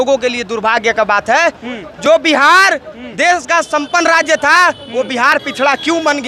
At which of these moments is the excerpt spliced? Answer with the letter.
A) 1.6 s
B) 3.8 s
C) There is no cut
C